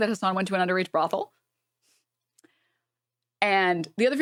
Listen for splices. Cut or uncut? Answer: uncut